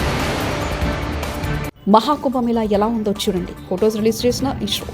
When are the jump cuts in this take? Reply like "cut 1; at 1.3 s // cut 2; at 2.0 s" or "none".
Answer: cut 1; at 1.7 s